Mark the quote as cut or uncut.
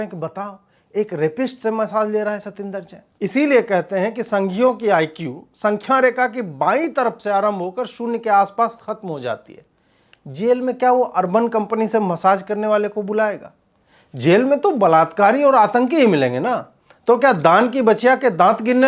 uncut